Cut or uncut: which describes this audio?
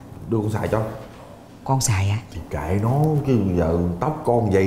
uncut